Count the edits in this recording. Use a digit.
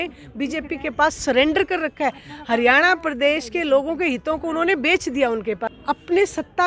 1